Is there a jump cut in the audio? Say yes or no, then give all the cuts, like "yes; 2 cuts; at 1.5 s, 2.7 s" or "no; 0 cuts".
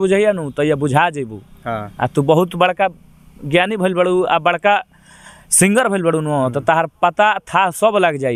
no; 0 cuts